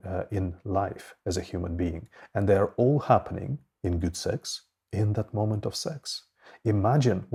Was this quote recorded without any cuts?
yes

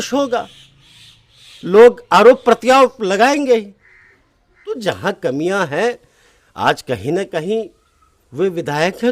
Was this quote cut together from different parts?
yes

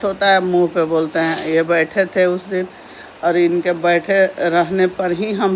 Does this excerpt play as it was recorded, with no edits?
yes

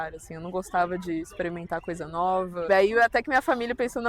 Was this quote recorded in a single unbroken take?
no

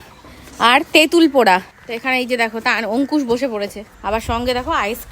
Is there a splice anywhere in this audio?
yes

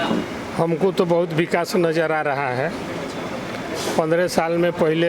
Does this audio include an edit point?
no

